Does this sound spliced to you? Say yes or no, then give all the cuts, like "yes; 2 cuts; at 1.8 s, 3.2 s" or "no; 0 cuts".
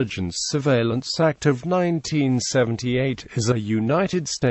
no; 0 cuts